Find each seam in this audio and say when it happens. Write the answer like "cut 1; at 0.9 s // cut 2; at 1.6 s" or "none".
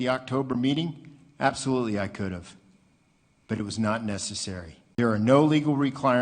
cut 1; at 4.8 s